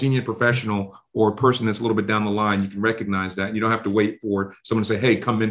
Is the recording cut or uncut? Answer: uncut